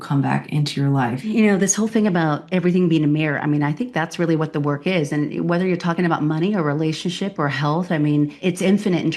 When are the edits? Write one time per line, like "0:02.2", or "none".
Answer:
0:01.2
0:08.4